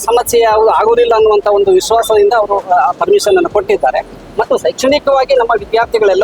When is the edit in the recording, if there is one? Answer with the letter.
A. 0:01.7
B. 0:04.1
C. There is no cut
C